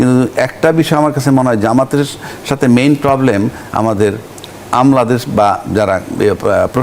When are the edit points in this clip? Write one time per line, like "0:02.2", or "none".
none